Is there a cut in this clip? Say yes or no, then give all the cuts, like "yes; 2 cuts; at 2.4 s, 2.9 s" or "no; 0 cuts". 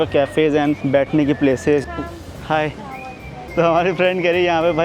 yes; 2 cuts; at 1.8 s, 3.4 s